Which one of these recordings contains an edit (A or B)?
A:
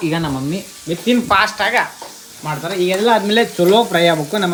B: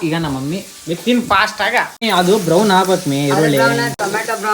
B